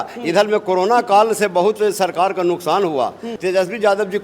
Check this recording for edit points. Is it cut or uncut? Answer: cut